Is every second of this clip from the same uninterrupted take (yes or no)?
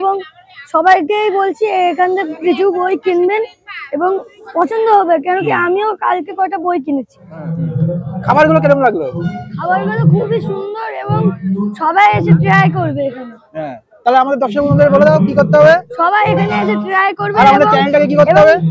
no